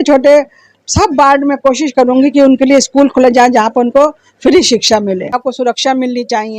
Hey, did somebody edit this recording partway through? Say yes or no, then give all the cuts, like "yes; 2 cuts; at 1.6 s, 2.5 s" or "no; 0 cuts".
yes; 1 cut; at 5.4 s